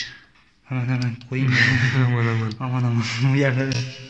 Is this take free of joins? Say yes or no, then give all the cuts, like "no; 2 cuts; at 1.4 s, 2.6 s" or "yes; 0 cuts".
yes; 0 cuts